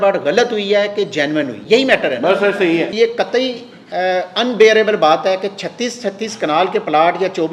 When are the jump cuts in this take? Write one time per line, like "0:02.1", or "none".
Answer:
0:01.6
0:02.9